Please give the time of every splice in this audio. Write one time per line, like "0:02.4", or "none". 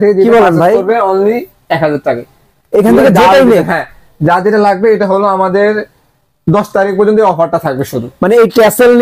none